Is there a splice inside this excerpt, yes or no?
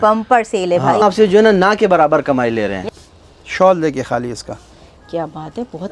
yes